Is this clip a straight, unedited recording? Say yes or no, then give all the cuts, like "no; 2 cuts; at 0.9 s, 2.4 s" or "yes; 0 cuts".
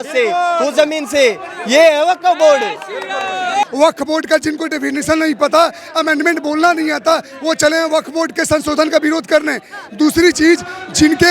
no; 1 cut; at 3.6 s